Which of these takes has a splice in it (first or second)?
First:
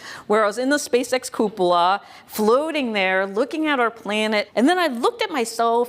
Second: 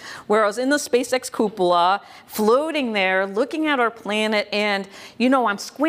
first